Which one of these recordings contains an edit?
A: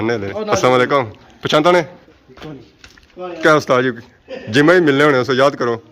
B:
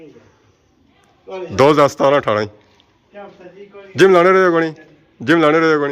A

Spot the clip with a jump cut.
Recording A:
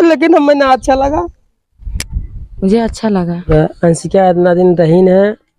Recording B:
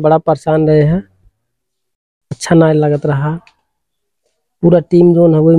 A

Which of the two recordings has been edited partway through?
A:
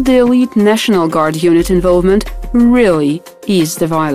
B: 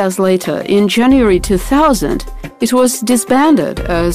B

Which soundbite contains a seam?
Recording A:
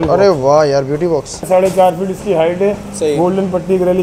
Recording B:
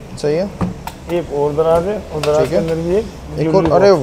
A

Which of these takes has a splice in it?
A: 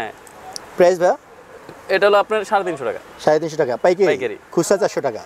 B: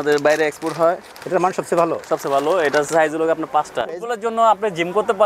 B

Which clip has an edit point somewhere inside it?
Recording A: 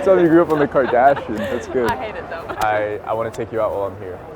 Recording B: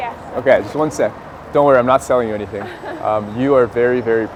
A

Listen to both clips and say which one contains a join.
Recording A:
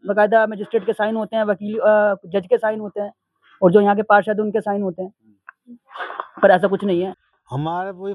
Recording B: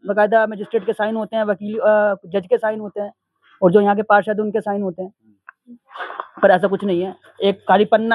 A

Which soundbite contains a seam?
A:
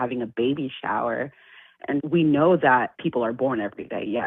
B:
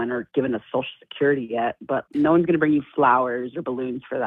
A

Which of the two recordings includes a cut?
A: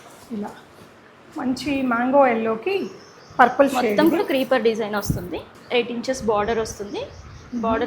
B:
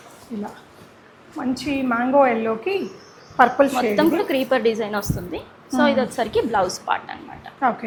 A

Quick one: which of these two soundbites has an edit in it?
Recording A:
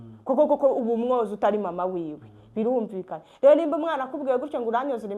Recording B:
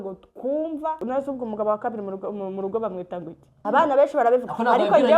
B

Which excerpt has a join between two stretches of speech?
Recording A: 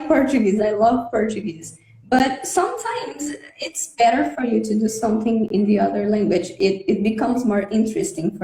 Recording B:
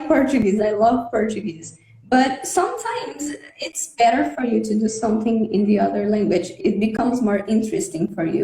B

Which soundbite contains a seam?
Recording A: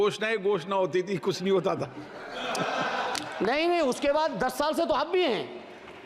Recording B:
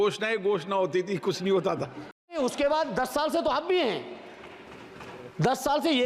B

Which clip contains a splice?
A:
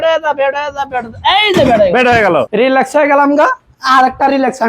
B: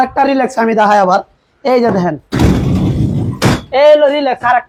A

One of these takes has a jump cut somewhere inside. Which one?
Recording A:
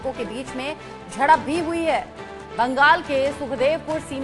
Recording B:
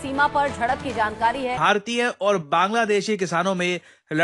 B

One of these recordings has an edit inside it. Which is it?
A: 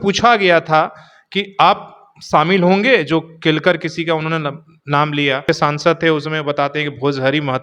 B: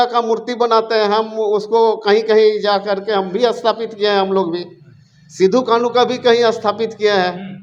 A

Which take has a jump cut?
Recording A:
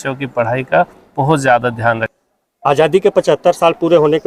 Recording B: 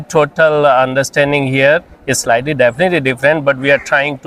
A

